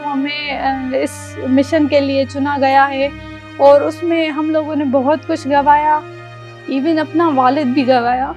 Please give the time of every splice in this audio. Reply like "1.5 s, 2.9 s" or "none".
none